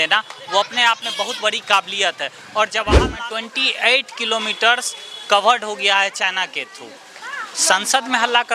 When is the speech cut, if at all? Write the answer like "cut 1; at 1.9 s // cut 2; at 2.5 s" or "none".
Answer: cut 1; at 3.0 s